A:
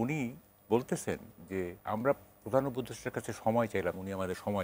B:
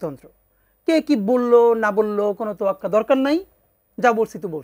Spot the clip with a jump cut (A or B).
A